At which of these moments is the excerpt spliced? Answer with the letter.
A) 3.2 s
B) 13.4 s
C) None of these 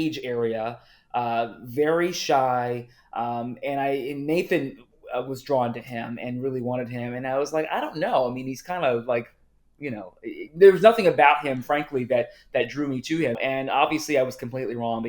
B